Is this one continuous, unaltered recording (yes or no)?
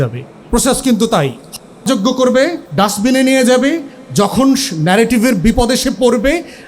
no